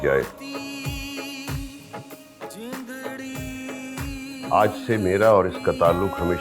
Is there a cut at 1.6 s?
no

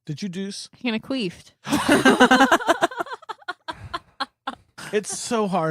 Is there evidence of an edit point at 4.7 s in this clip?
yes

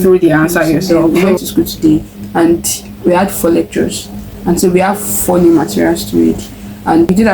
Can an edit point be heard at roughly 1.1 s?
yes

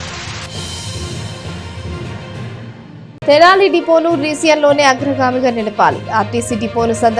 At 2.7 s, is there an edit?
yes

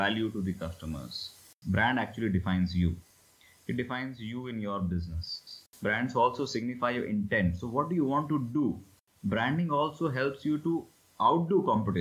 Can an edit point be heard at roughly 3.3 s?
no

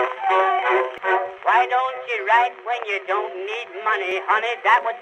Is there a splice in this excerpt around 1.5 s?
no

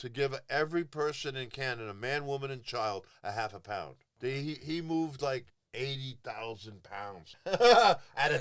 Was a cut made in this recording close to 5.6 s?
yes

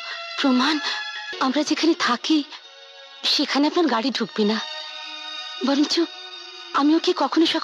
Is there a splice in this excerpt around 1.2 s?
yes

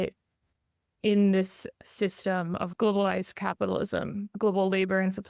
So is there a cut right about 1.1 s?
no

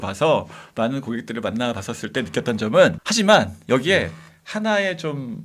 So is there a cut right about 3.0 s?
yes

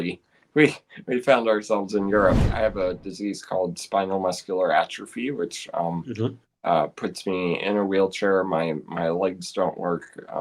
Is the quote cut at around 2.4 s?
yes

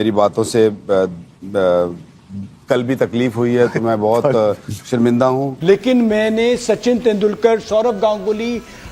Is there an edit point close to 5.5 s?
yes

